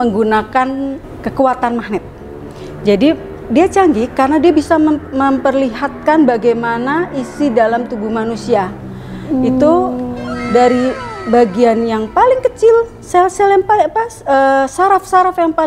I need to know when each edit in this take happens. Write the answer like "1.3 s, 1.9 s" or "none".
1.0 s